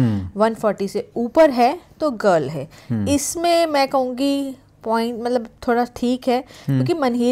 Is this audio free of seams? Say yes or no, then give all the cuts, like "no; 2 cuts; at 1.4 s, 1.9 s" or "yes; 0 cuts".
yes; 0 cuts